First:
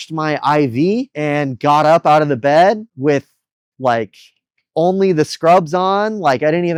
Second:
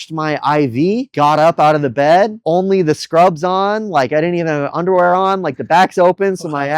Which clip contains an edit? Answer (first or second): second